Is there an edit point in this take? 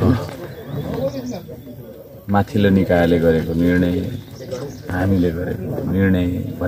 no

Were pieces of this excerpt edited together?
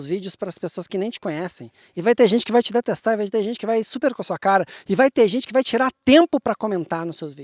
no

